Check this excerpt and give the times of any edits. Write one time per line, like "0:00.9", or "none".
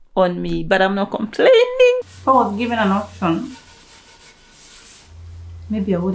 0:02.1